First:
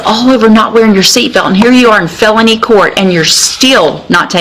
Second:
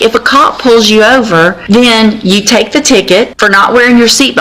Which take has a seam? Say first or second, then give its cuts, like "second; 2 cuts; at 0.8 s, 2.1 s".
second; 2 cuts; at 1.6 s, 3.3 s